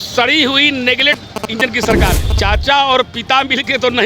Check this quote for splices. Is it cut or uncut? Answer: cut